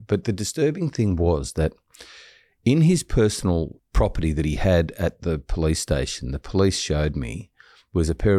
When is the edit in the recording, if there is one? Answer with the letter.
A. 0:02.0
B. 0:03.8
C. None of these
B